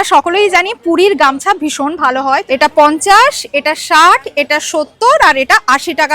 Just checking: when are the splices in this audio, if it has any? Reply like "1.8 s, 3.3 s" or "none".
2.4 s